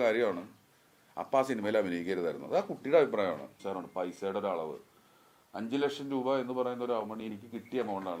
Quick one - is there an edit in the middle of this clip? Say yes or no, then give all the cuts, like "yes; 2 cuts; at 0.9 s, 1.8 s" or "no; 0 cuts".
yes; 1 cut; at 3.5 s